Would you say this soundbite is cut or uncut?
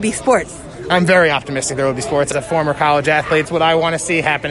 cut